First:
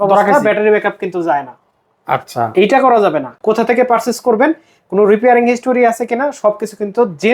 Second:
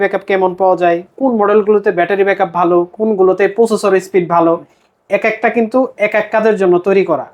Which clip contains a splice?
first; 1 cut; at 3.3 s

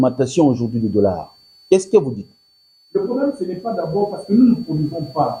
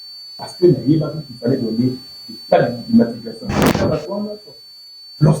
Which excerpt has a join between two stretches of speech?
second; 1 cut; at 3.6 s

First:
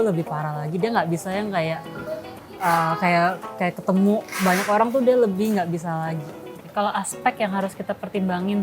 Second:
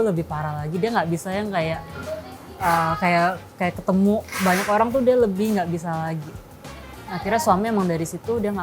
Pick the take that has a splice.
first; 1 cut; at 6.6 s

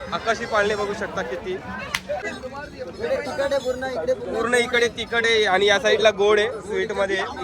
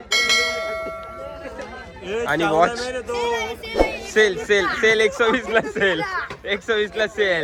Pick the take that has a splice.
first; 1 cut; at 2.2 s

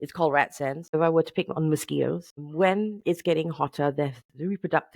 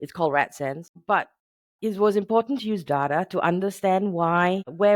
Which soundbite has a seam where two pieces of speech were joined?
first; 2 cuts; at 0.9 s, 2.4 s

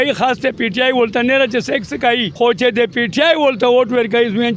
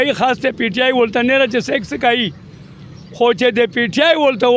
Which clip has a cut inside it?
first; 1 cut; at 2.3 s

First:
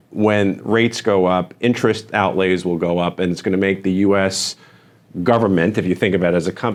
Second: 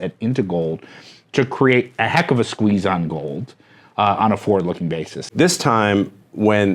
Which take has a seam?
second; 1 cut; at 5.3 s

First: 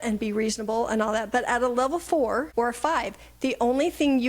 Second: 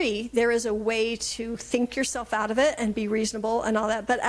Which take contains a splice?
first; 1 cut; at 2.5 s

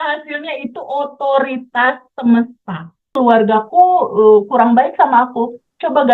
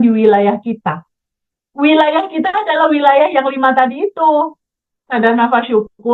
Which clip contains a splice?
first; 1 cut; at 3.0 s

